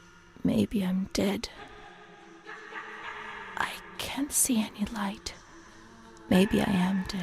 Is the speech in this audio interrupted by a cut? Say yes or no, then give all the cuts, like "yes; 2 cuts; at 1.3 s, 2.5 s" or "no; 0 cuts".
no; 0 cuts